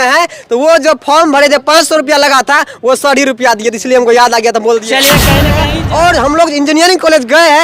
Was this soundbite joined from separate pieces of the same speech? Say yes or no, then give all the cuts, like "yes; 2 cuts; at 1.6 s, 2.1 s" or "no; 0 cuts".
yes; 1 cut; at 5.7 s